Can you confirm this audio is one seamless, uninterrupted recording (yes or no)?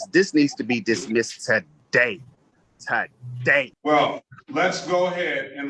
no